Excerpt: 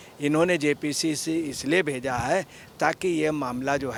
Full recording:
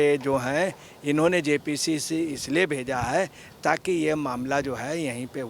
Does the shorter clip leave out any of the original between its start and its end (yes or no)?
no